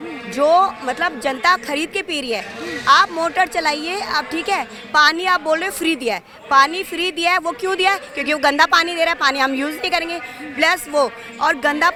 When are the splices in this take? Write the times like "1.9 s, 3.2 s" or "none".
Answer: none

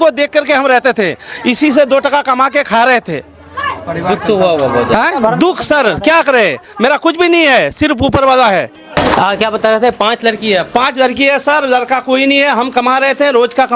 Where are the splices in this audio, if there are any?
8.9 s

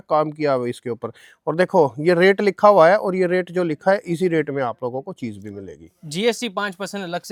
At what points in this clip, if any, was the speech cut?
none

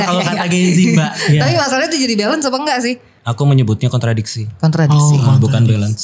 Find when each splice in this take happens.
3.2 s

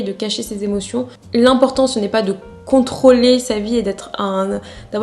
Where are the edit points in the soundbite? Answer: 1.2 s

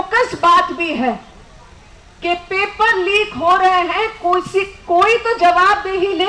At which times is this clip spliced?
none

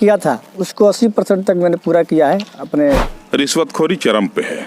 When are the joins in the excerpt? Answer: 3.2 s

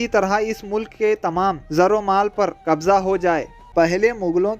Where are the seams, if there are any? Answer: 3.6 s

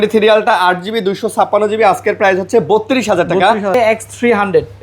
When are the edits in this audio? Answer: 3.7 s

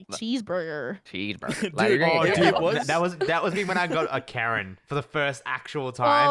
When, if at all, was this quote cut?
none

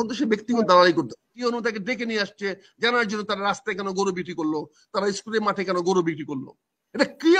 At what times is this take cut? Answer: 1.3 s

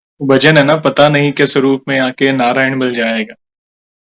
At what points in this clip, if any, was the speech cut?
none

